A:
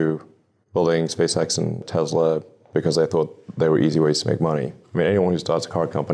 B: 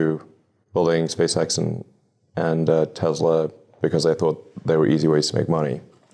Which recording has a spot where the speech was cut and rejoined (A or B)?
A